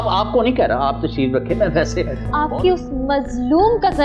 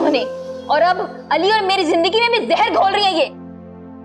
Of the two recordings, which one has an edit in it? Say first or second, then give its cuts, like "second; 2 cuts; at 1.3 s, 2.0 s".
first; 1 cut; at 2.2 s